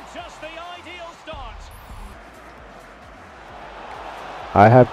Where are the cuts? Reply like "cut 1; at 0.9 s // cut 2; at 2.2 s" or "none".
cut 1; at 2.2 s